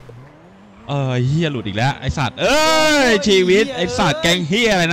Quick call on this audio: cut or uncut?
uncut